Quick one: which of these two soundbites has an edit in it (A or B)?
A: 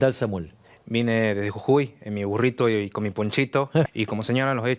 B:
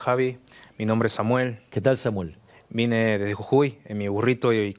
A